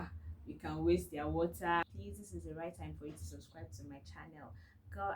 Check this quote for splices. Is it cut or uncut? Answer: cut